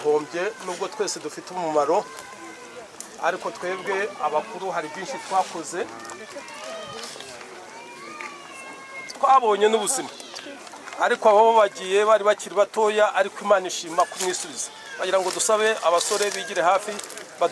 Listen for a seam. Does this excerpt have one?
no; 0 cuts

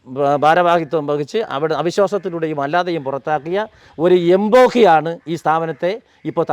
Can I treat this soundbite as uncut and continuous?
yes; 0 cuts

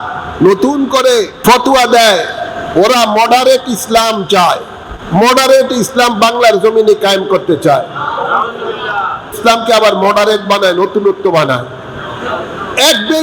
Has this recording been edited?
yes; 2 cuts; at 1.3 s, 9.4 s

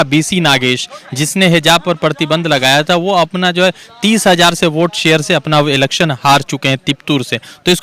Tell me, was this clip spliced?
no; 0 cuts

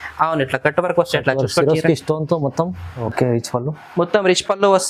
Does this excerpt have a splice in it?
yes; 1 cut; at 2.9 s

